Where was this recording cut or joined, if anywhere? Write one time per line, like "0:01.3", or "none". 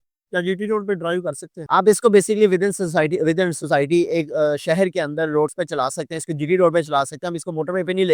none